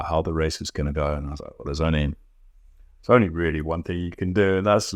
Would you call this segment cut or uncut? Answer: uncut